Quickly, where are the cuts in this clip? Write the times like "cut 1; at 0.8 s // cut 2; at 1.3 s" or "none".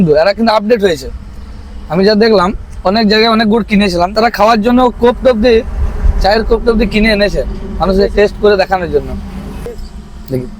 cut 1; at 4.1 s // cut 2; at 9.7 s